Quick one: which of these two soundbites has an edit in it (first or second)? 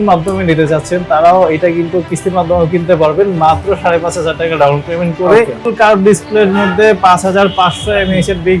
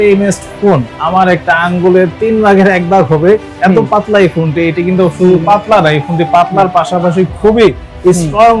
first